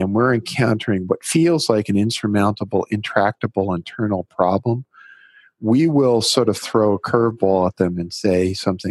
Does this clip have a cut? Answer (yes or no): yes